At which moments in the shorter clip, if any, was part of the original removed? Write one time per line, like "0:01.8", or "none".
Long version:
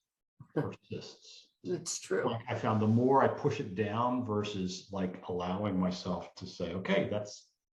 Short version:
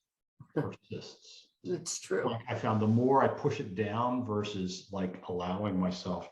none